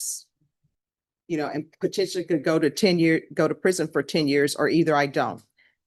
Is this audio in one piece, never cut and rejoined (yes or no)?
yes